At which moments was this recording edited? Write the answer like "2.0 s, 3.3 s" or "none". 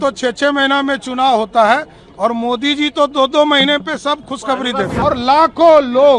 5.0 s